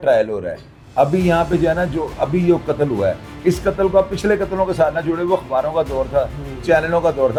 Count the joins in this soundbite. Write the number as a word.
zero